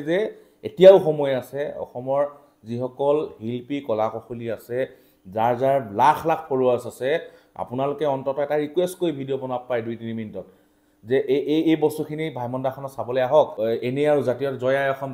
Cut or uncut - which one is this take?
cut